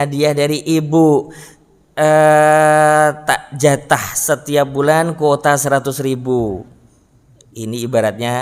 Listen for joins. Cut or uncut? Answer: uncut